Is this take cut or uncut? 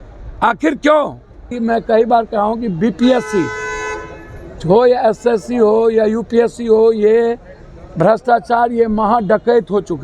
cut